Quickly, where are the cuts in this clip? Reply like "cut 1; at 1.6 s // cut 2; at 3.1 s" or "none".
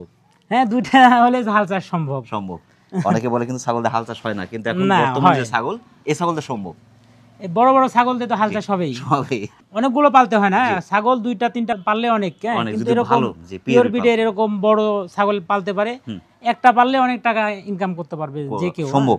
none